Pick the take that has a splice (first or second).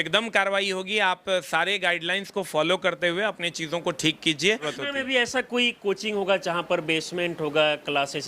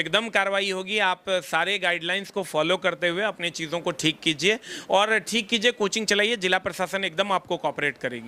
first